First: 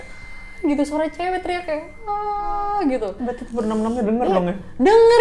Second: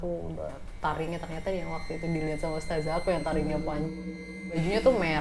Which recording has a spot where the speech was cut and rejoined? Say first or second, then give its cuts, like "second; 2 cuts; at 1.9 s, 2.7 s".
second; 1 cut; at 4.3 s